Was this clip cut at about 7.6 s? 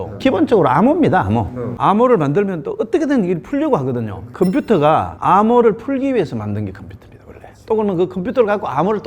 no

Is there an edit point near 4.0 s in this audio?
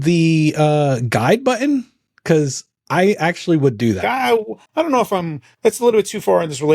yes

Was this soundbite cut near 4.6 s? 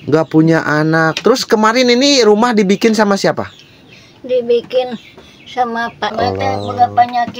no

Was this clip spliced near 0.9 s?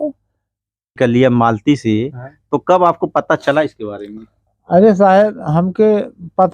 yes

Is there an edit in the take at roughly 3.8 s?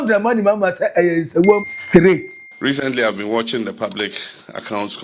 no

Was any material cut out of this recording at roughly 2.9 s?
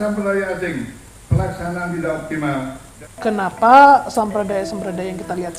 yes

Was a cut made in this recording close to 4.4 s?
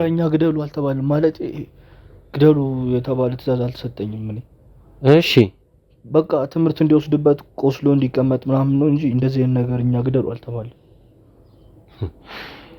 no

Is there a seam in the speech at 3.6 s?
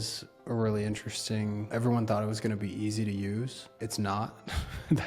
yes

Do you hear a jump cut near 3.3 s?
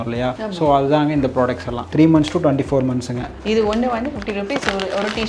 yes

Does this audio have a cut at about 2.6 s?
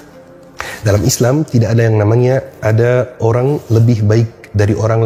no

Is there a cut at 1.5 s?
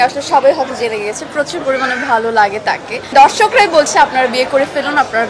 no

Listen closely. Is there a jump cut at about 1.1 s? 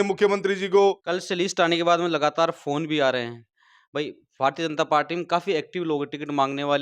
yes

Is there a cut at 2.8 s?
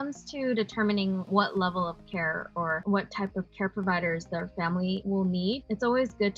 yes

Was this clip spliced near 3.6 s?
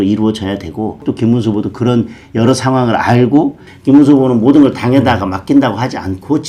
yes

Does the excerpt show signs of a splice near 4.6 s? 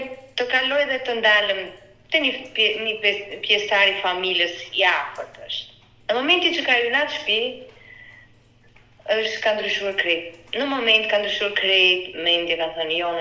no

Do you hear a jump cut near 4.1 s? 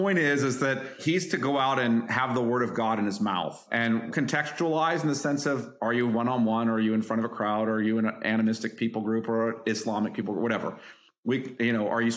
yes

